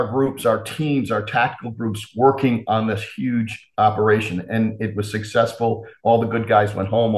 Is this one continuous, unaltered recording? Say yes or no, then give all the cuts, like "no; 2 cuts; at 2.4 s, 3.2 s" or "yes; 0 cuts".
yes; 0 cuts